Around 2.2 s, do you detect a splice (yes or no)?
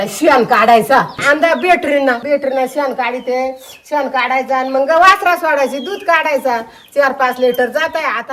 yes